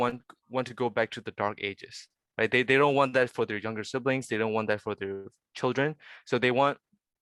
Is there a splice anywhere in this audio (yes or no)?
no